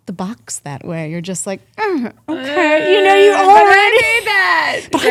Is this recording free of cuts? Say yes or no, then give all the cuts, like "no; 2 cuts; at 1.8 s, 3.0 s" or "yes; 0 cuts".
yes; 0 cuts